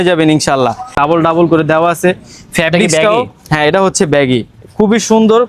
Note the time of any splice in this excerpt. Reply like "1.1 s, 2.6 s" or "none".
1.0 s

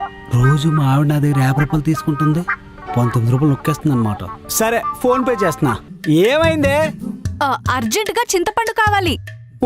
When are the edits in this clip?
5.9 s

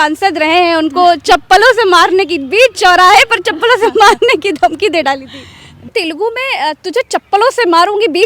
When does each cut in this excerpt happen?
5.9 s

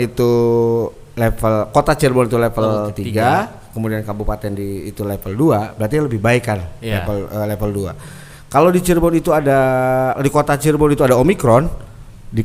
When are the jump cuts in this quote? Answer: none

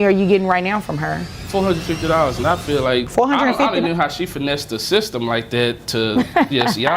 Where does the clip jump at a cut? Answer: 1.3 s, 3.1 s

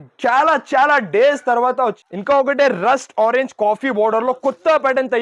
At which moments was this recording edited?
2.0 s

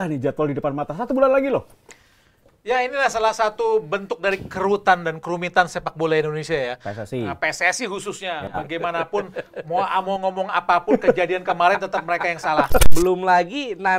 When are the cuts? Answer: 12.8 s

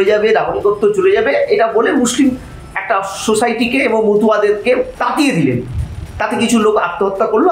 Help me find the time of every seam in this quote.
4.9 s

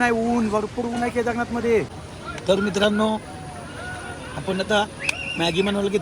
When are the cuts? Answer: 1.9 s

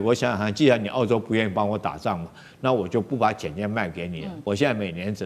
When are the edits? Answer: 4.3 s

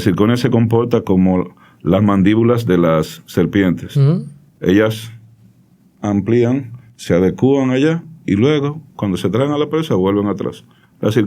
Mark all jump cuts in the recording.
none

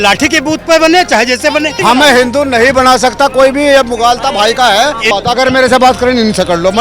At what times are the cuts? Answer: 1.7 s, 5.1 s

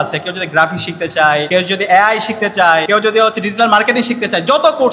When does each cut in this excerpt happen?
1.5 s, 2.9 s

